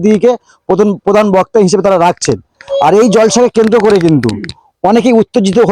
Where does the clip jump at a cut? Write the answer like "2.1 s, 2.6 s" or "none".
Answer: none